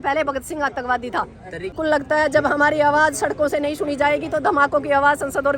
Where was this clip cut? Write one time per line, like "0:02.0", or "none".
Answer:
0:01.7